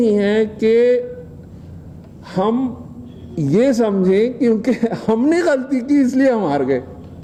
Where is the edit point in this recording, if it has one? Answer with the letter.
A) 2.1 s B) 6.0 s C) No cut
C